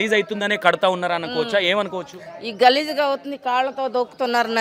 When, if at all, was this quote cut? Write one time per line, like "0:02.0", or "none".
none